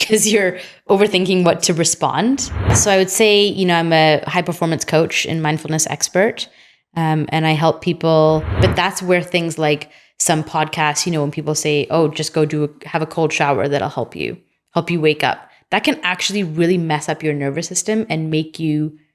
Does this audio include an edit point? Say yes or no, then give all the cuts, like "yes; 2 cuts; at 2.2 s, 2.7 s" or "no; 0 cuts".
yes; 2 cuts; at 2.7 s, 8.5 s